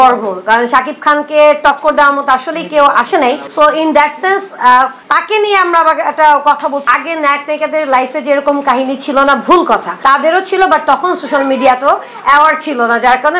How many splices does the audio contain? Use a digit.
2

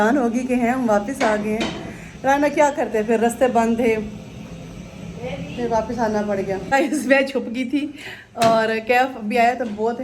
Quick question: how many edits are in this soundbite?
0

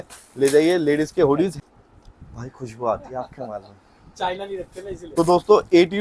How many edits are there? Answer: 2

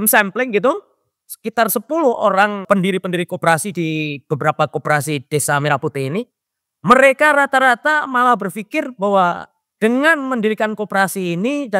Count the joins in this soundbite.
1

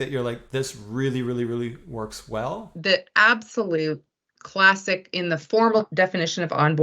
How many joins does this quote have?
2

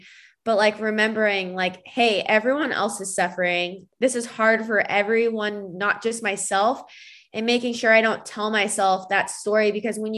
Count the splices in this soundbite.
1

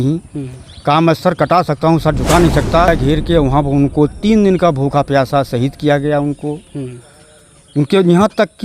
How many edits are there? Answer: 1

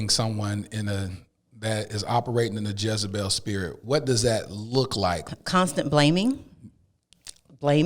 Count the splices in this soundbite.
1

